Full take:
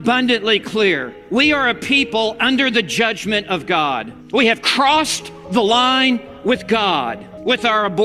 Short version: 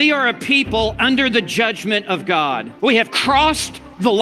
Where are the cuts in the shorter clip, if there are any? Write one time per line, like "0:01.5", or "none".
0:02.7